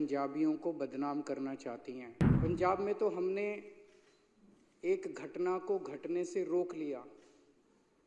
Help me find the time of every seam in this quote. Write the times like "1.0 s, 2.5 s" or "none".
2.2 s

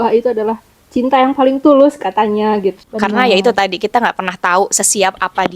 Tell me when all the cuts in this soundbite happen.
2.8 s

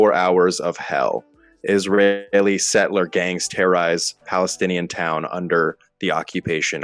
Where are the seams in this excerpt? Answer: none

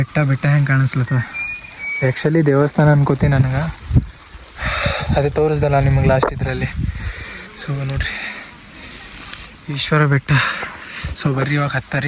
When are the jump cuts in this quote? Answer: none

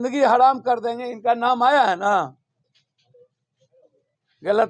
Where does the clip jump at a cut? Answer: none

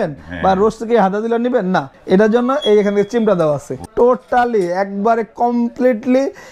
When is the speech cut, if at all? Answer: 1.9 s, 3.8 s

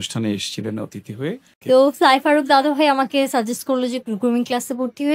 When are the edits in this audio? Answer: 1.5 s

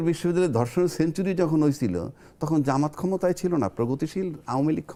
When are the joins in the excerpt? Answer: none

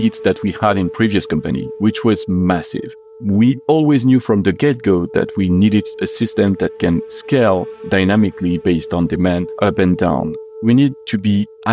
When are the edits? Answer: 3.0 s, 9.5 s, 10.4 s

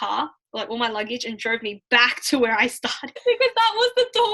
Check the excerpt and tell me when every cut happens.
3.1 s

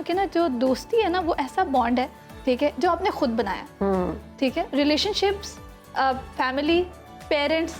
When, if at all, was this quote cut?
none

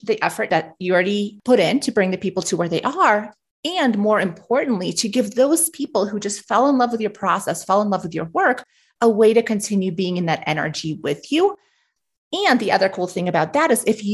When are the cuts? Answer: 0.9 s

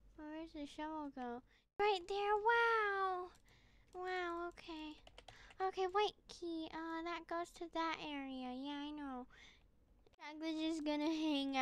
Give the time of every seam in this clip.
1.8 s, 10.3 s

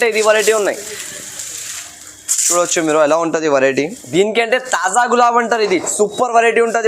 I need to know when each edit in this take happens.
4.1 s

